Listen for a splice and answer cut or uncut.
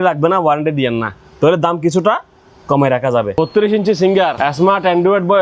cut